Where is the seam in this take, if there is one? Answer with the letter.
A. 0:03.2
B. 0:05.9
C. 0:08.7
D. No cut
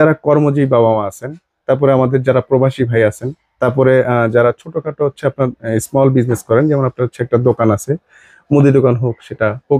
D